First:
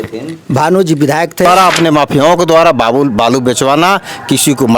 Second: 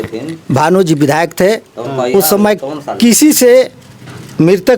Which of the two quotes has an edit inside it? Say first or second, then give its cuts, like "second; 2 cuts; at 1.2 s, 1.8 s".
first; 1 cut; at 1.5 s